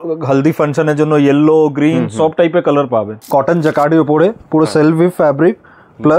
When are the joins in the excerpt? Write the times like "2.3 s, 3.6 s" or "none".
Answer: 3.2 s